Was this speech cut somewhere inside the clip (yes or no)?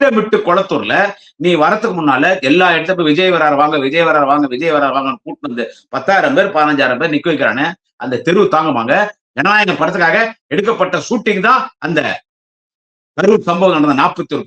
yes